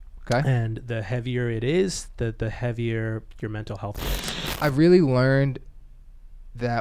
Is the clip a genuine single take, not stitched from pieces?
no; 1 cut; at 4.3 s

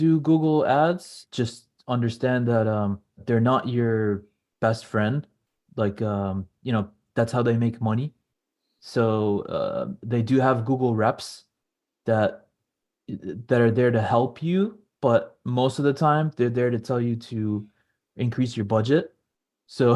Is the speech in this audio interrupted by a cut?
yes; 2 cuts; at 1.2 s, 3.2 s

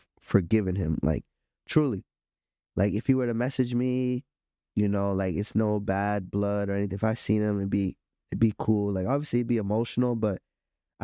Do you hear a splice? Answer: no; 0 cuts

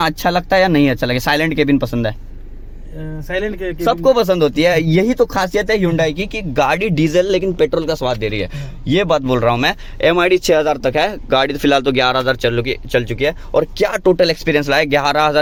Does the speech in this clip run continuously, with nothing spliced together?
yes; 0 cuts

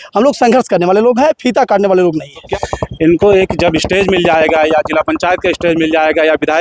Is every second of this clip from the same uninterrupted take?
no; 1 cut; at 2.5 s

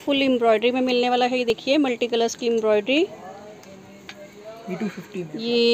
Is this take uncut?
yes; 0 cuts

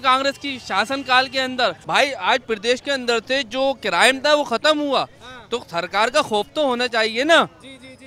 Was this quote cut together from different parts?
yes; 1 cut; at 1.8 s

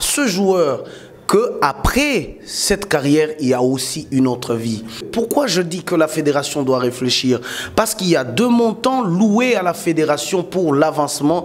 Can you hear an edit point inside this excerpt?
yes; 1 cut; at 5.1 s

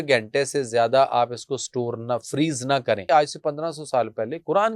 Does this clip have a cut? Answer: yes; 1 cut; at 3.0 s

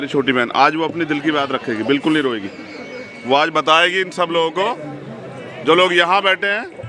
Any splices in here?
no; 0 cuts

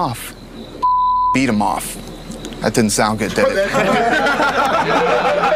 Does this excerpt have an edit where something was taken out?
no; 0 cuts

